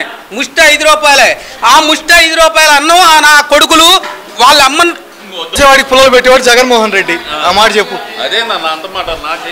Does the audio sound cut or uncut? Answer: cut